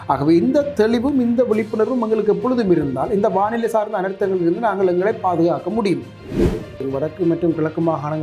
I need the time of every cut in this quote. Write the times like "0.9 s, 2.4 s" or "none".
6.5 s

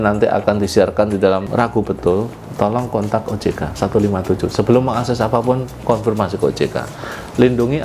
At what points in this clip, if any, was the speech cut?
1.5 s

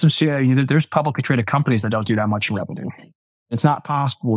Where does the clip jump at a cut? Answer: 3.4 s

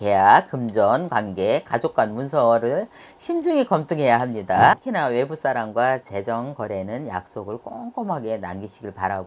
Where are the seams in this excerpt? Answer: 4.7 s

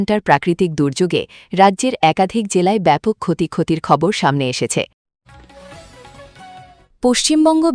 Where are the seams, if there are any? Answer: 5.0 s, 6.8 s

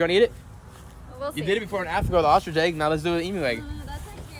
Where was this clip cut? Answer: none

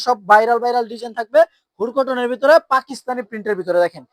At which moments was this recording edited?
none

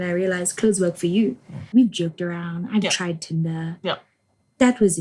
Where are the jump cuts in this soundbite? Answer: 1.6 s

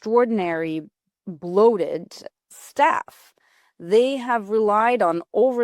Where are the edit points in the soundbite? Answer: none

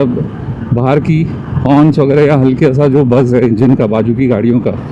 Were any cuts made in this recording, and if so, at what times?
none

